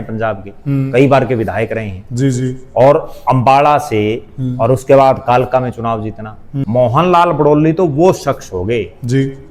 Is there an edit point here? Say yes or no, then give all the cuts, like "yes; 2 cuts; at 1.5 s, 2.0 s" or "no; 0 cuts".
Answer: yes; 1 cut; at 6.5 s